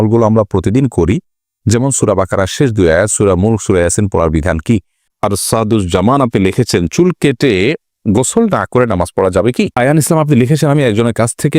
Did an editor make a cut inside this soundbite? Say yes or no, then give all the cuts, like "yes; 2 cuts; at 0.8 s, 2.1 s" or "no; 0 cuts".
yes; 2 cuts; at 5.0 s, 9.7 s